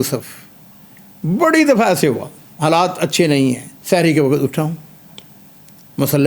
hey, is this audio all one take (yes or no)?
no